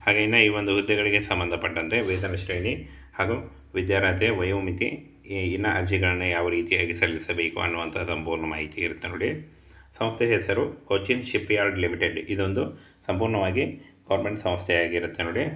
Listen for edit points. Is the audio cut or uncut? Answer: uncut